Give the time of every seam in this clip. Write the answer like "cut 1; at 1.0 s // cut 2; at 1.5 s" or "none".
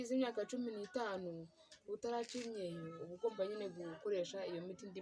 none